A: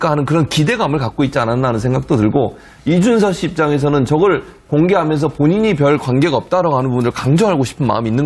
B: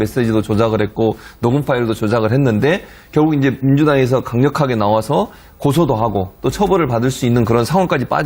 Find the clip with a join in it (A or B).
B